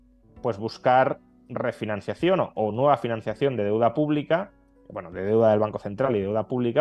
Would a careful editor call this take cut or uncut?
uncut